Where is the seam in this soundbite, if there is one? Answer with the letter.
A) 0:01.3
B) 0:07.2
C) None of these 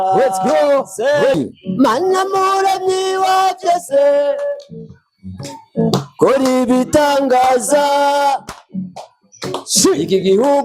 A